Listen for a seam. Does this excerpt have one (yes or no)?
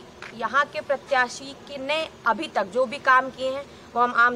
no